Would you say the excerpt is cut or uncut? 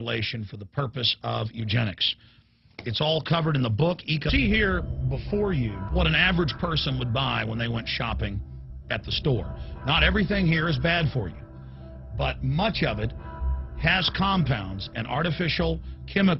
uncut